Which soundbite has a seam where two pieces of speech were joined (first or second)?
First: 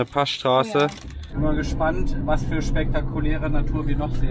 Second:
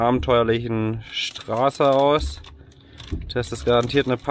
first